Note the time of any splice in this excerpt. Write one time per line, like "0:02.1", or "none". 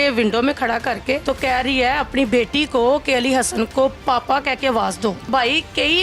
0:01.2
0:05.2